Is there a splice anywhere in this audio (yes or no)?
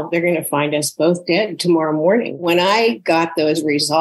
yes